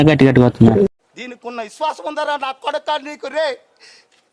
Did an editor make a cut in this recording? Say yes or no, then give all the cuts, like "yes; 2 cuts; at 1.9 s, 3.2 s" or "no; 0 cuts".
yes; 1 cut; at 0.9 s